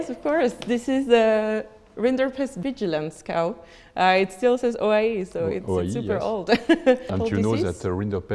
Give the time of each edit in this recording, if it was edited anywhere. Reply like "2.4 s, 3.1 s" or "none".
7.1 s